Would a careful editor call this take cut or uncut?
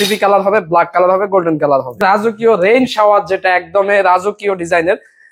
cut